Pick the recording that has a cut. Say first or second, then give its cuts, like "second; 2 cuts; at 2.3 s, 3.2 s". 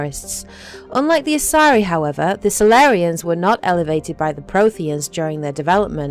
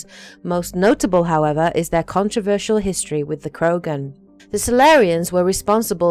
second; 1 cut; at 2.3 s